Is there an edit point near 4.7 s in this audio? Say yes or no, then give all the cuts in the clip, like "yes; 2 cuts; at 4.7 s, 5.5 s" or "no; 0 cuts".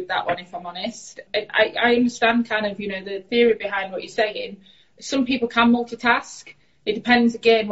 no; 2 cuts; at 1.2 s, 3.2 s